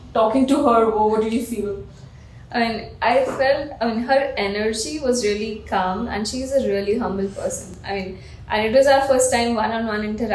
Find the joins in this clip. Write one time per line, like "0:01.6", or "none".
none